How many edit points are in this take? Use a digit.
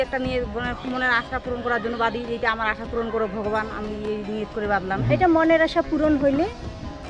1